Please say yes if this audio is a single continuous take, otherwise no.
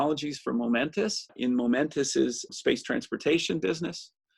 no